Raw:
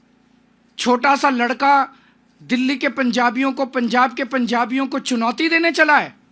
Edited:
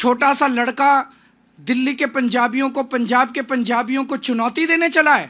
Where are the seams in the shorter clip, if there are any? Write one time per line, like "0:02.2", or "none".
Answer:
none